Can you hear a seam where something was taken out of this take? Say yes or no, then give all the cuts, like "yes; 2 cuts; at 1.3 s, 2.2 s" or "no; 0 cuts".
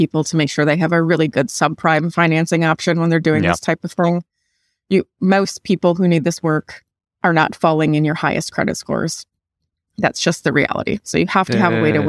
no; 0 cuts